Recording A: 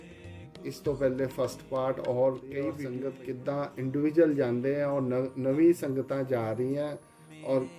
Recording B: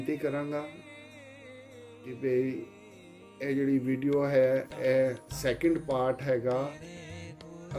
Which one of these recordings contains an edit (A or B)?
A